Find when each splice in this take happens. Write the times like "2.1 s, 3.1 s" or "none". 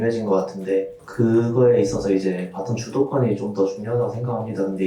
1.0 s